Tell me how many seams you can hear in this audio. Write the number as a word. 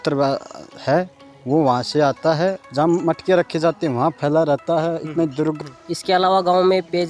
two